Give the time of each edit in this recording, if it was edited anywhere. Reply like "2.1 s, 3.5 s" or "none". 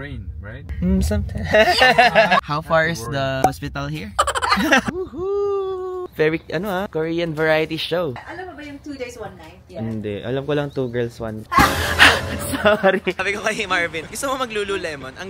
1.5 s, 4.9 s, 6.1 s, 9.6 s, 13.2 s